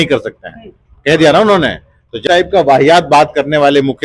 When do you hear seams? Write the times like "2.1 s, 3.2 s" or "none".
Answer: 2.2 s